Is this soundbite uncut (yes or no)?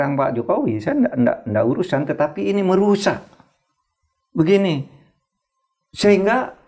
yes